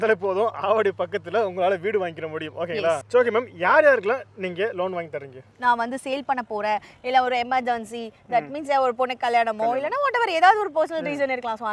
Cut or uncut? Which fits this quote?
cut